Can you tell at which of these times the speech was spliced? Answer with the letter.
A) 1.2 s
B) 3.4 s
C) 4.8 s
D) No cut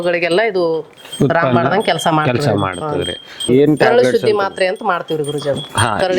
B